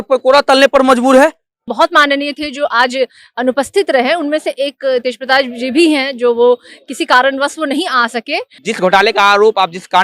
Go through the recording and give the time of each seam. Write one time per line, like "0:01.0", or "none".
0:01.7
0:08.6

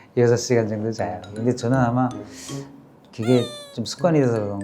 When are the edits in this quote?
0:01.3

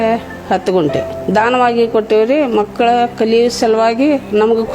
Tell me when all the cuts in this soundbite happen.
0:01.1

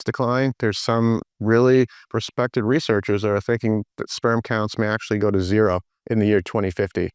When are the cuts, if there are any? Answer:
0:05.9

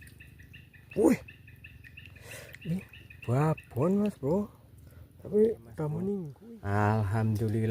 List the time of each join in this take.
0:06.3

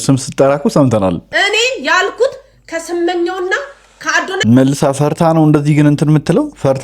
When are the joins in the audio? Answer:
0:01.2

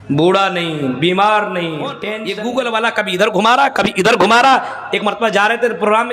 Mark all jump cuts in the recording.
0:02.1

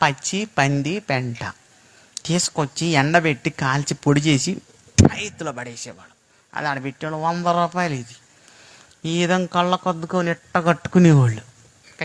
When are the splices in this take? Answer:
none

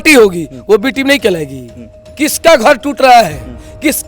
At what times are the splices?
0:02.0

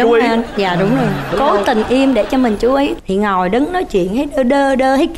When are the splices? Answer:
0:02.9

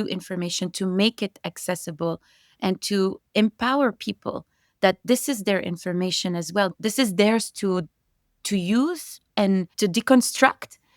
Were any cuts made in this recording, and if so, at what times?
0:06.7
0:09.7

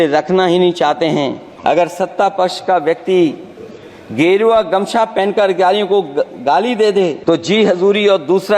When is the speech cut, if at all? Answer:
0:01.4
0:07.2

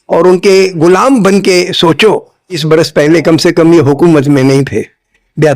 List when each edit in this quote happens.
0:02.6

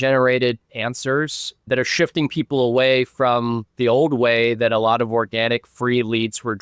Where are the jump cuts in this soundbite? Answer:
none

